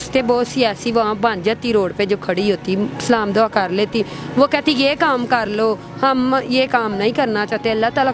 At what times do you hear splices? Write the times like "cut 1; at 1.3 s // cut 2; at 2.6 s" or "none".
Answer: none

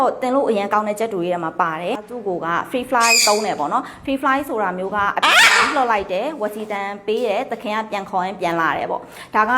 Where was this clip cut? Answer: cut 1; at 2.0 s

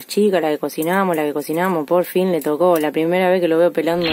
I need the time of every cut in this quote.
none

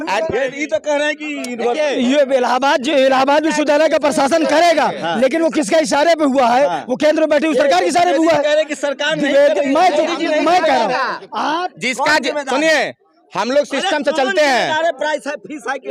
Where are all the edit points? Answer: none

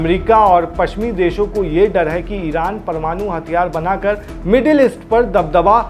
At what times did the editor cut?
none

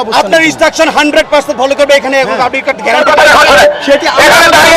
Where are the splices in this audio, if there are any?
cut 1; at 3.0 s

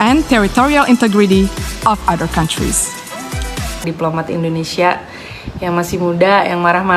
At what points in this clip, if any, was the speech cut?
cut 1; at 3.8 s

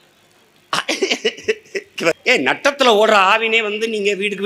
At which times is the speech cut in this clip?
cut 1; at 2.2 s

